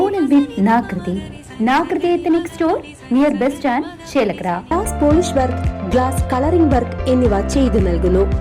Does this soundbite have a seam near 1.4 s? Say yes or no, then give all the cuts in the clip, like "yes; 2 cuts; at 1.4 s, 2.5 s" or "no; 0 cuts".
no; 1 cut; at 4.7 s